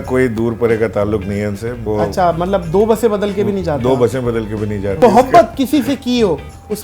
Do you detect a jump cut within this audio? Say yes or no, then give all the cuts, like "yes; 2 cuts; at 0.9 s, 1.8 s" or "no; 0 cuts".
yes; 2 cuts; at 1.7 s, 5.0 s